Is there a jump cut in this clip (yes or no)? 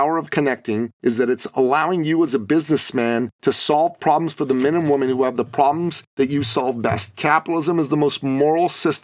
yes